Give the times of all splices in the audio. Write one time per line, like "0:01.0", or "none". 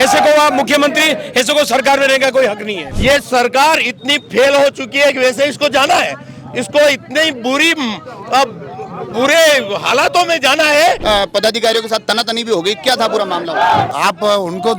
0:02.9
0:11.0
0:13.9